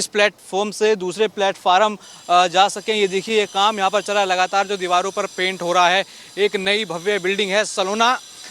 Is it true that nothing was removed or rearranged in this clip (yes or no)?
yes